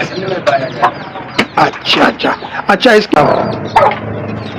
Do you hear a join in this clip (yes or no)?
yes